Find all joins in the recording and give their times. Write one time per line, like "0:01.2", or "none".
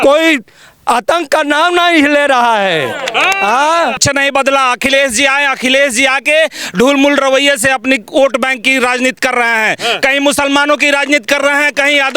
0:04.0